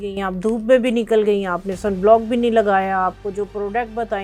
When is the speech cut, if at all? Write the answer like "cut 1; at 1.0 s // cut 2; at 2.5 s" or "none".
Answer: none